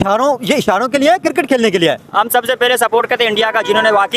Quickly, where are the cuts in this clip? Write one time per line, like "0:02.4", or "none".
0:02.0

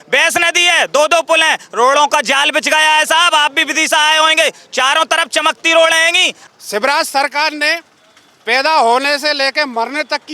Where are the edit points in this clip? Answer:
0:06.3

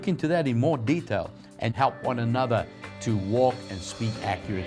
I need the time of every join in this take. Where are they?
0:01.6

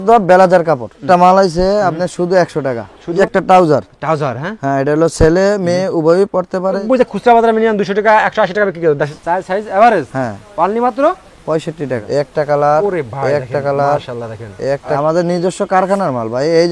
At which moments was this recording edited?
0:01.0
0:03.2
0:06.8
0:09.1
0:12.0
0:15.0

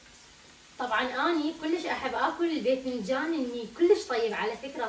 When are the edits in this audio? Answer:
none

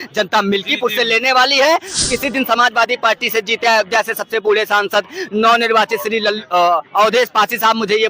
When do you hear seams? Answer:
0:01.9

